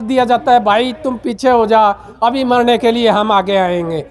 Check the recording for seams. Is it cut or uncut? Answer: uncut